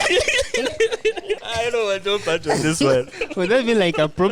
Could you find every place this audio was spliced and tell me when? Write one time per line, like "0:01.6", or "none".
0:01.4
0:03.2